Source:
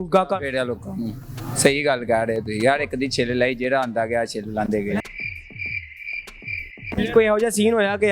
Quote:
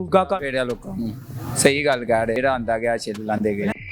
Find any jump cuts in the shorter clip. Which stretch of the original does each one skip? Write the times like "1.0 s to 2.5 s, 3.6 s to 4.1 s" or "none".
2.3 s to 3.6 s